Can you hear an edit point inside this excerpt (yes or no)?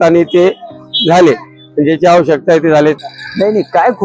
yes